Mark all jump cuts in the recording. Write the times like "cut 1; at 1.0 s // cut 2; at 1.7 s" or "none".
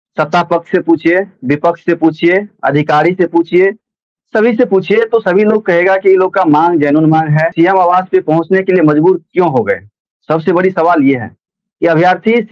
cut 1; at 7.5 s